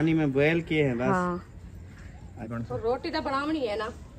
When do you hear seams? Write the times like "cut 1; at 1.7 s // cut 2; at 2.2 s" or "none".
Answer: cut 1; at 2.5 s